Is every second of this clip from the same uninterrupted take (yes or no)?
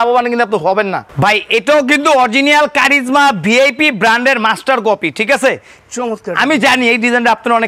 no